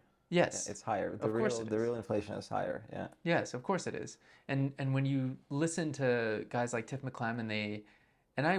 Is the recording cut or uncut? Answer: uncut